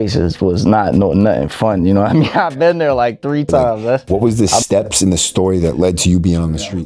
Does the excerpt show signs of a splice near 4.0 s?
yes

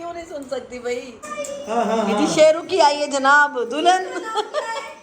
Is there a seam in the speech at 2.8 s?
no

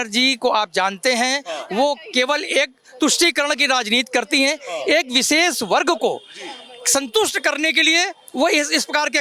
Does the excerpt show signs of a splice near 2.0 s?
no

